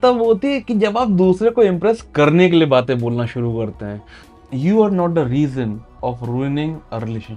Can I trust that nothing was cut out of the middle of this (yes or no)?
no